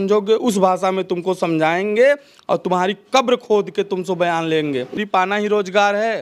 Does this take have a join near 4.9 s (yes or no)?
yes